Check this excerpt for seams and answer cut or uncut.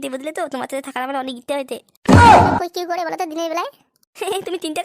cut